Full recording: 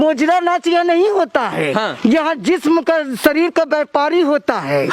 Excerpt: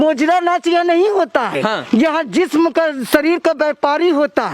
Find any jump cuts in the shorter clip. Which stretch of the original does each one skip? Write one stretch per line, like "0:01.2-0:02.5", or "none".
0:01.5-0:01.6